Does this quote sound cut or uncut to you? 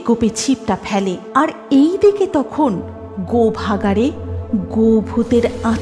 cut